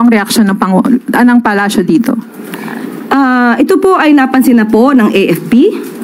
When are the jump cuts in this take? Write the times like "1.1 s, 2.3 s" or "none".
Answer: none